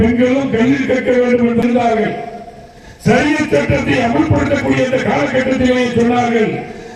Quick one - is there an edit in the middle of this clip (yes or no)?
yes